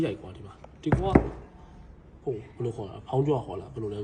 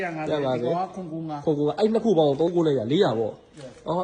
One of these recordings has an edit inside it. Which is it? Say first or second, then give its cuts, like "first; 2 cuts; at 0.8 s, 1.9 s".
second; 1 cut; at 2.5 s